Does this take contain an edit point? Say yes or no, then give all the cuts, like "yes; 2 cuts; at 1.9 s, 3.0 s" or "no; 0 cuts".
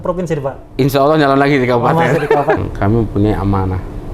yes; 1 cut; at 2.6 s